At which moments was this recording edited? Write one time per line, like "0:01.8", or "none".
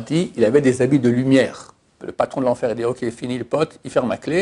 0:02.0